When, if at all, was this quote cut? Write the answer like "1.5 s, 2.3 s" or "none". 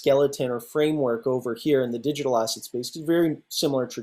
none

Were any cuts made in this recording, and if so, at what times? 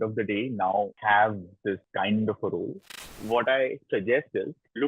0.9 s, 1.9 s, 3.2 s

